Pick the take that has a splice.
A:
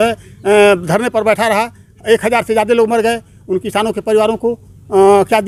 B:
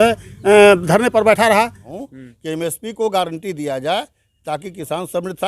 B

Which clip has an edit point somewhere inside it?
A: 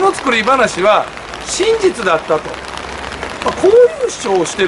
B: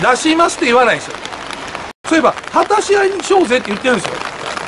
B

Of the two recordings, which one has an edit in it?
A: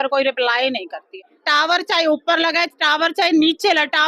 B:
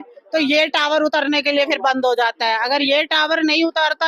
A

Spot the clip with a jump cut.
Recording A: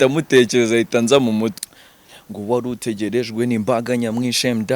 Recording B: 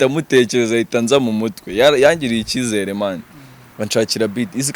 A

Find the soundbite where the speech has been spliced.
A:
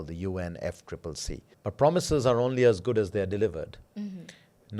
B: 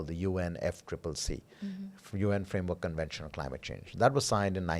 A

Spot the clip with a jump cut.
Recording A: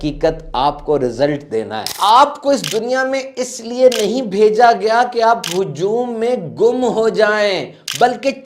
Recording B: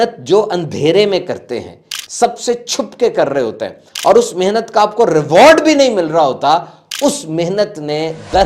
A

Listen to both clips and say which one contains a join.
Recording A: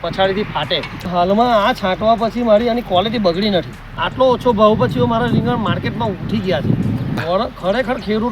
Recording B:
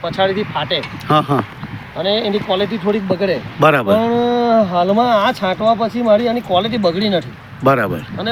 A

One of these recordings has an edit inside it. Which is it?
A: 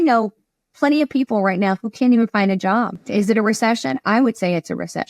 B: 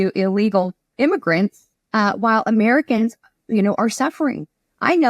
A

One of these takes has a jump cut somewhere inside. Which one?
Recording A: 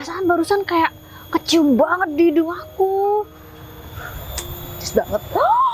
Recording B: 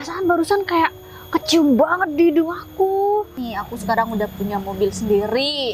B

